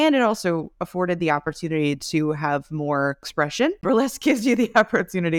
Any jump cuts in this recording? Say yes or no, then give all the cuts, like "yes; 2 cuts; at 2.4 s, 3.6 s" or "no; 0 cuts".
yes; 1 cut; at 3.6 s